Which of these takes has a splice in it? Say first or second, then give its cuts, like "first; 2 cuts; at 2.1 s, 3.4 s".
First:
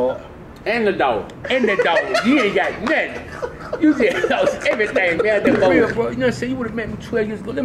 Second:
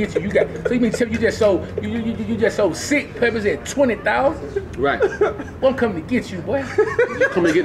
first; 1 cut; at 5.8 s